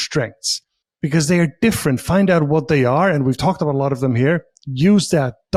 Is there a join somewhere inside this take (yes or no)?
no